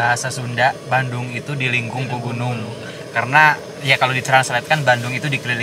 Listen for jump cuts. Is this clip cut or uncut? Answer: uncut